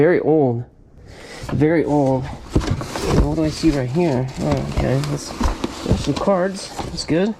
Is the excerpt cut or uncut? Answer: uncut